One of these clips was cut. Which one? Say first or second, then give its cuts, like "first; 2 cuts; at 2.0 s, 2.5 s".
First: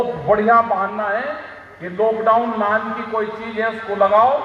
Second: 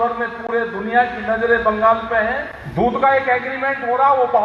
second; 1 cut; at 2.6 s